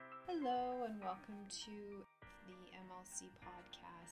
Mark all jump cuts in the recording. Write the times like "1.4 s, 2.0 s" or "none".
2.1 s